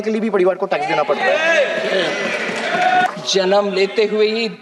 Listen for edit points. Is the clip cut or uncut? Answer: cut